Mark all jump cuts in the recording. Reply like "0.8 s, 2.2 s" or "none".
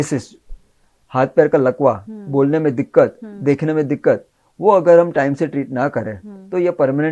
none